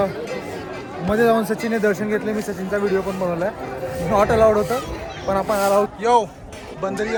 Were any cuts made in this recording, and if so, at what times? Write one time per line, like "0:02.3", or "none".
none